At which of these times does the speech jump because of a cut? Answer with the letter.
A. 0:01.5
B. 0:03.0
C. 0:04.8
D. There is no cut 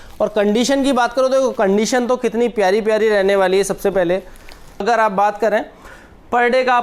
C